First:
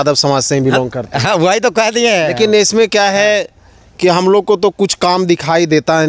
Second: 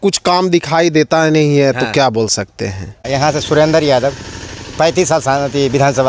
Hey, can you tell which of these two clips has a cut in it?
second; 1 cut; at 3.1 s

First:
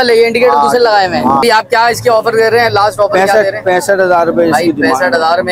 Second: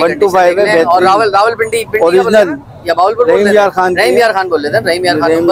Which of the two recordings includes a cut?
first; 1 cut; at 1.4 s

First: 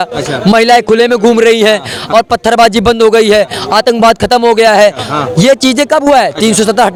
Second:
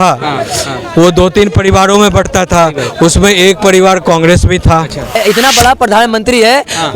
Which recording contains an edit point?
second; 1 cut; at 5.2 s

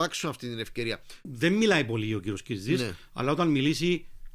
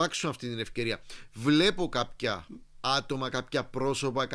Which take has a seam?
first; 1 cut; at 1.2 s

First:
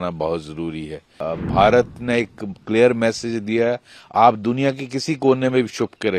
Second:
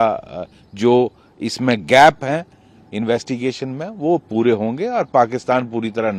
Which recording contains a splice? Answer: first; 1 cut; at 1.3 s

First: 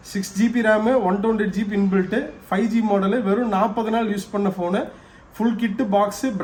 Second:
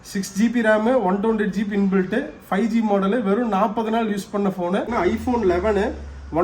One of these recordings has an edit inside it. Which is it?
second; 1 cut; at 4.9 s

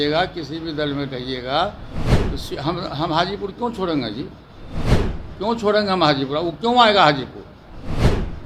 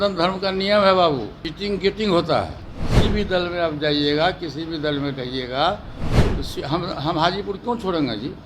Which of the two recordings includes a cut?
second; 1 cut; at 1.4 s

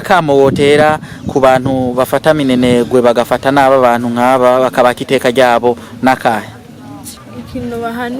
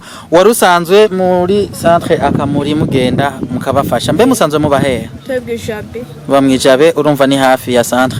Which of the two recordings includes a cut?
first; 1 cut; at 7.2 s

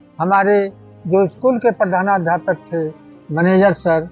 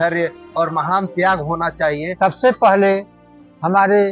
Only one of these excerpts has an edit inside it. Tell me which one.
second; 1 cut; at 2.1 s

